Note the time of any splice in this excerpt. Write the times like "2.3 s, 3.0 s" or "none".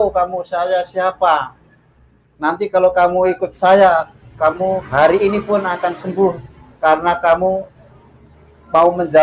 none